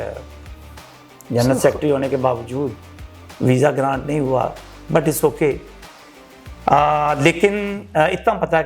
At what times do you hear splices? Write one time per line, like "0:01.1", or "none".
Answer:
none